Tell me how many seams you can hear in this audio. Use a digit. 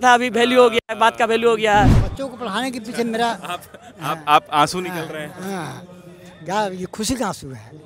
1